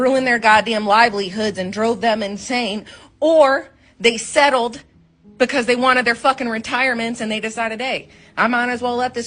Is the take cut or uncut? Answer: uncut